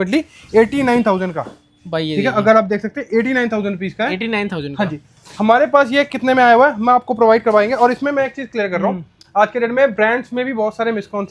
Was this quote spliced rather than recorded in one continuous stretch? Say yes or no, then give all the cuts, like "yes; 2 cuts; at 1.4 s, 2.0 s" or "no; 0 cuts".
no; 0 cuts